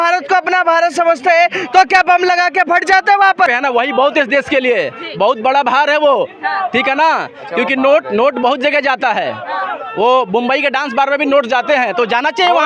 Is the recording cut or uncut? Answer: cut